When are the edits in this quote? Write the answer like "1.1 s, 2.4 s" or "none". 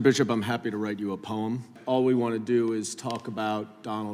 1.8 s